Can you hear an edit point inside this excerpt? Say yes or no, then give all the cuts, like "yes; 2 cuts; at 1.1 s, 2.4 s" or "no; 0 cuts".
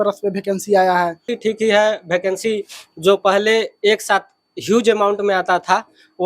yes; 1 cut; at 1.3 s